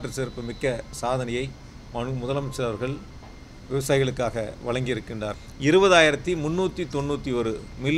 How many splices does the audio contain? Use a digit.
1